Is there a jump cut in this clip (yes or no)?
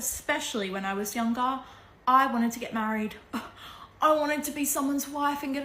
no